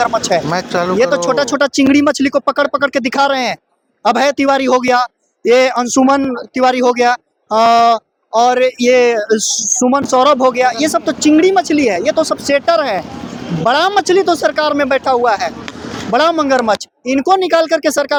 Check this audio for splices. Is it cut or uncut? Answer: uncut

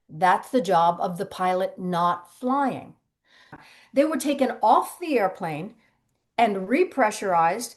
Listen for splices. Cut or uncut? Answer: cut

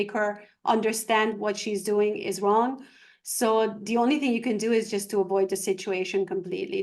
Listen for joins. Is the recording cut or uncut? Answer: uncut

